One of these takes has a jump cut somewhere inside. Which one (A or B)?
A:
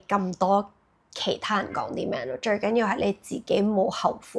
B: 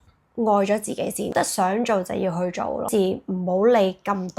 B